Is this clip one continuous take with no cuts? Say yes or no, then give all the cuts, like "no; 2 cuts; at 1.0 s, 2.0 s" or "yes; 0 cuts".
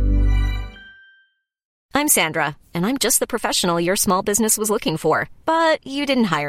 no; 1 cut; at 1.7 s